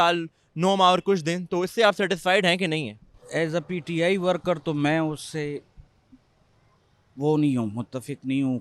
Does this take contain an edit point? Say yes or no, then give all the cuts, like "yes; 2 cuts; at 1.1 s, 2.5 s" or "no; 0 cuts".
no; 0 cuts